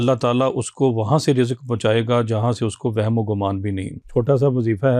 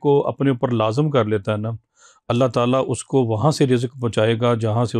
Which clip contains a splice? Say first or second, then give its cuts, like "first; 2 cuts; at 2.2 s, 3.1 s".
first; 1 cut; at 3.9 s